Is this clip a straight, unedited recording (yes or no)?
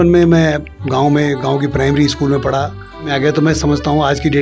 no